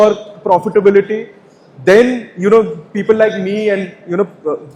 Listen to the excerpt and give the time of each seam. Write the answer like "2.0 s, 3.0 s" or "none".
none